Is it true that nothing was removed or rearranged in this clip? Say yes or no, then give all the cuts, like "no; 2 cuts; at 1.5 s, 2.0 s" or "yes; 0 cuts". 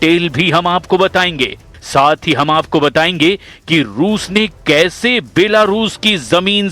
no; 1 cut; at 2.2 s